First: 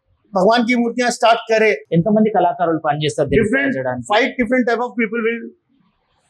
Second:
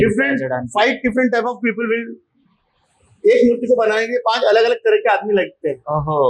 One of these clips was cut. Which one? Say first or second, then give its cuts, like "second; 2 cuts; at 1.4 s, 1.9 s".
first; 1 cut; at 1.8 s